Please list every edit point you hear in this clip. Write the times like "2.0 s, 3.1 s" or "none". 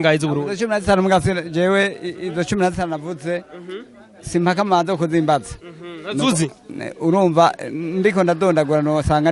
none